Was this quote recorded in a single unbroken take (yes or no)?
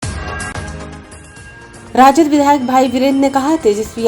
yes